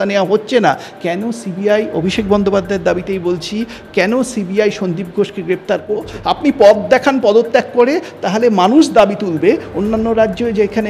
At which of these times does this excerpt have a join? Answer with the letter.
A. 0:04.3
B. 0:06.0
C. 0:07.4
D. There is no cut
B